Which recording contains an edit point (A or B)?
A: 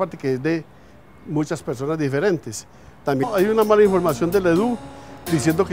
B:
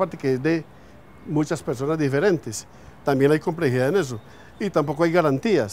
B